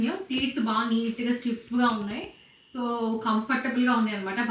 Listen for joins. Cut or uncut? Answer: uncut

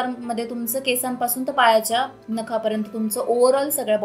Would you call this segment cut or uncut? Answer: uncut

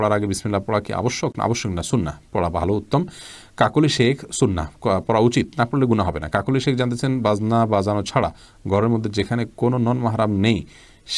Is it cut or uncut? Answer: uncut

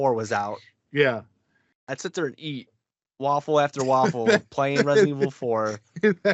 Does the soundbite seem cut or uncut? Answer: uncut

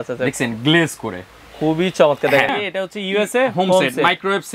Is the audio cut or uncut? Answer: cut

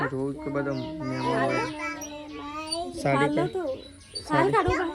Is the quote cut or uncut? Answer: uncut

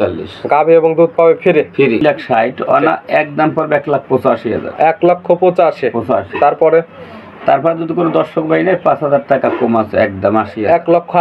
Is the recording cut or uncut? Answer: cut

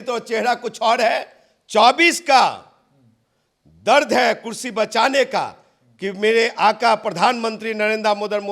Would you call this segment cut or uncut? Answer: uncut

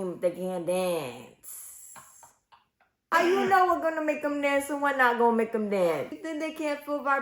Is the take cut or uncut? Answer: uncut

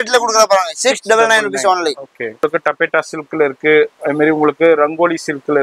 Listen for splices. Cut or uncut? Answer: cut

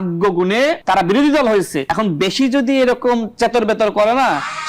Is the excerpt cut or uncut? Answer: cut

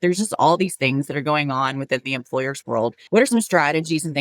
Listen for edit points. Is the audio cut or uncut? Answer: cut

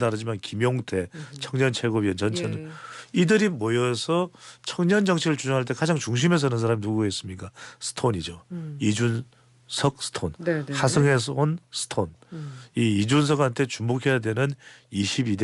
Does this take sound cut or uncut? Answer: uncut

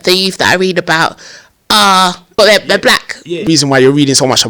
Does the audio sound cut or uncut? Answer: cut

